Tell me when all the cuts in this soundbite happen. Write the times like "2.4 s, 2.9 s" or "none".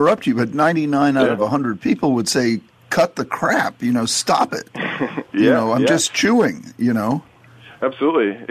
none